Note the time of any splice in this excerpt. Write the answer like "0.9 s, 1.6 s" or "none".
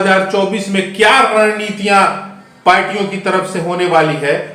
none